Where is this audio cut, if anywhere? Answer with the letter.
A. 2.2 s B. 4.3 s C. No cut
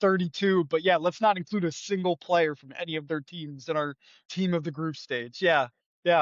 B